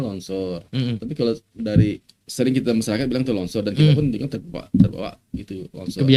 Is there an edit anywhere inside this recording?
no; 0 cuts

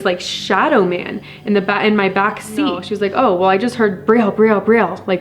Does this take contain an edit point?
yes; 1 cut; at 2.9 s

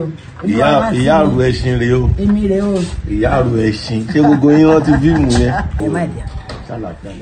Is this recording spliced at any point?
yes; 1 cut; at 5.8 s

